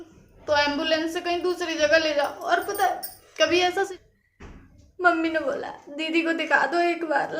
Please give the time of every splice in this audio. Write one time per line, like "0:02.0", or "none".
0:03.9

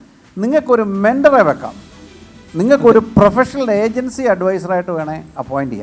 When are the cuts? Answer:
none

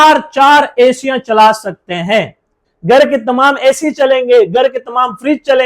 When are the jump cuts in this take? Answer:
0:02.5

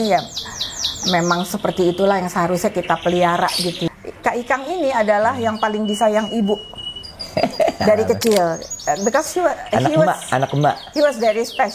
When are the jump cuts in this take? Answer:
0:03.8

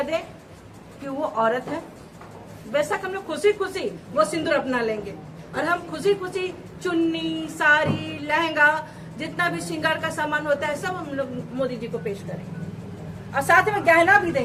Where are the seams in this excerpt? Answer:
none

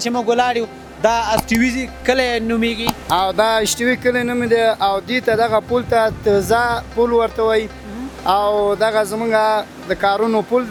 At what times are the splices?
none

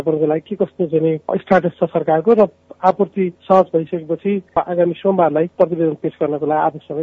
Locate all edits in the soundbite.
0:03.4
0:04.5
0:05.5

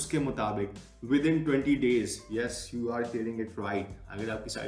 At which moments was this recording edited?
none

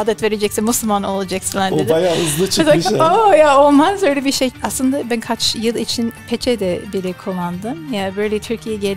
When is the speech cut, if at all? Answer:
0:04.5

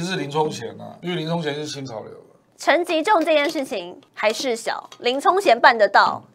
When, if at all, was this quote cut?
0:00.9
0:02.5
0:04.0

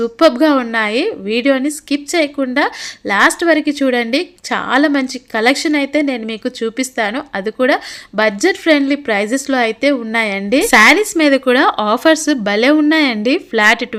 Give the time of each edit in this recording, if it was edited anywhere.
none

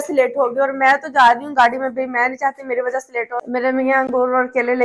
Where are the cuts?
0:03.5

